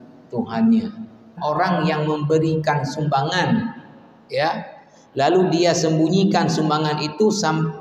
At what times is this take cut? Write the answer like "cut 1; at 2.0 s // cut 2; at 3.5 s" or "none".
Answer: cut 1; at 1.4 s